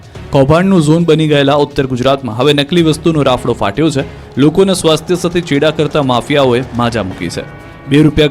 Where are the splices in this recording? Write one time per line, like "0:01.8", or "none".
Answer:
0:06.1